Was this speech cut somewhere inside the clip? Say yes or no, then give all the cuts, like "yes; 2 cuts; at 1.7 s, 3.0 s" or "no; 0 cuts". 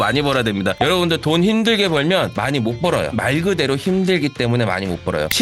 yes; 1 cut; at 3.1 s